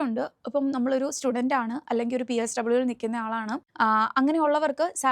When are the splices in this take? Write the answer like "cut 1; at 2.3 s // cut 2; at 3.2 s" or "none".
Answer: cut 1; at 3.6 s

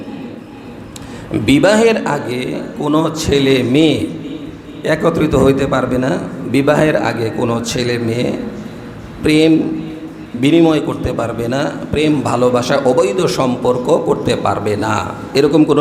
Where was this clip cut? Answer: none

